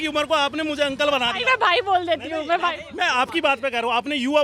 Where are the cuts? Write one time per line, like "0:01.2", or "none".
none